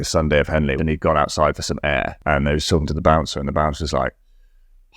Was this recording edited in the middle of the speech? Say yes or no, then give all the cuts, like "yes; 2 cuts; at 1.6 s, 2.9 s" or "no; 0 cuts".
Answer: yes; 2 cuts; at 0.8 s, 2.1 s